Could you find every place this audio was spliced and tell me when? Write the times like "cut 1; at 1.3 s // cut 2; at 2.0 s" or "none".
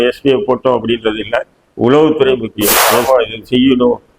cut 1; at 2.9 s